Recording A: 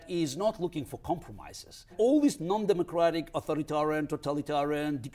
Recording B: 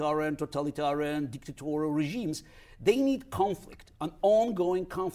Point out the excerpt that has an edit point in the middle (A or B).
A